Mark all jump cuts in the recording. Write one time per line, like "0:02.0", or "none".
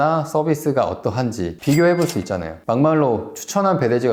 none